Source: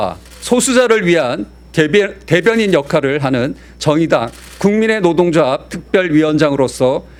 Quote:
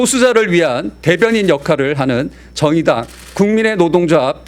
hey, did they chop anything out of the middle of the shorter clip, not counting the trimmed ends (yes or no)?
yes